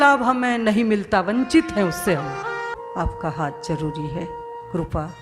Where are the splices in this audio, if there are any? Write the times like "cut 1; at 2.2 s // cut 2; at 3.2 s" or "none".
cut 1; at 2.7 s